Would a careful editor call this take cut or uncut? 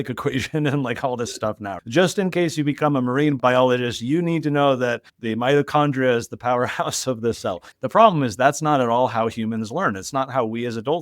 cut